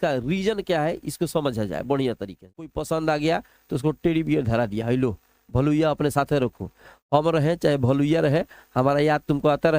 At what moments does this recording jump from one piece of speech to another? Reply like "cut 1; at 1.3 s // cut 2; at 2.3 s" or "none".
cut 1; at 2.5 s